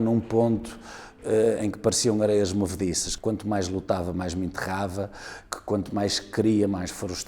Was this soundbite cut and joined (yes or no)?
yes